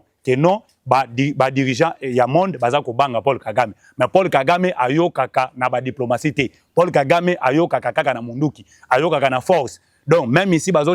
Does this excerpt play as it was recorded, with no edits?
yes; 0 cuts

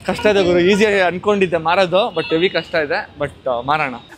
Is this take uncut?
yes; 0 cuts

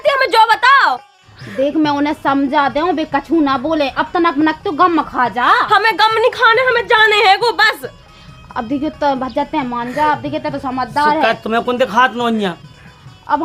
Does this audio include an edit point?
no; 0 cuts

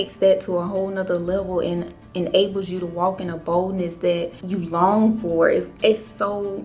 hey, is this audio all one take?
no; 2 cuts; at 4.4 s, 5.7 s

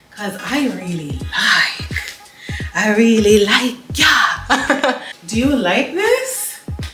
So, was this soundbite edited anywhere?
no; 0 cuts

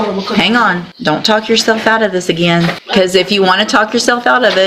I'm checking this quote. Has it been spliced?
yes; 2 cuts; at 0.9 s, 2.8 s

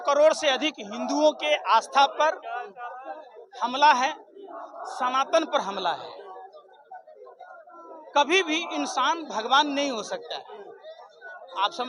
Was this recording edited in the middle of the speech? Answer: no; 0 cuts

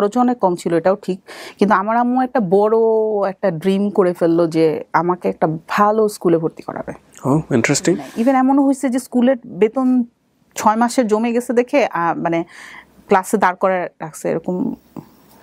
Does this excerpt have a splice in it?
yes; 1 cut; at 8.1 s

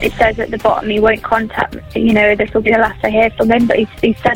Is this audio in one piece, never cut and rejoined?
yes; 0 cuts

